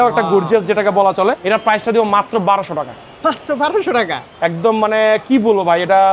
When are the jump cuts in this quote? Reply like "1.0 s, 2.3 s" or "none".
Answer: 1.4 s, 4.2 s